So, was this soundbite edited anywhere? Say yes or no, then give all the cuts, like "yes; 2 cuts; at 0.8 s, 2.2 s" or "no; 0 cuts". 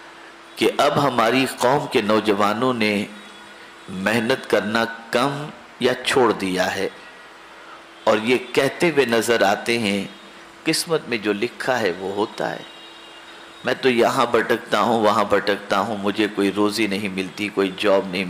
no; 0 cuts